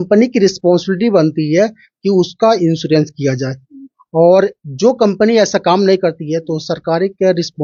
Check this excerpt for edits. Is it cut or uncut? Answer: uncut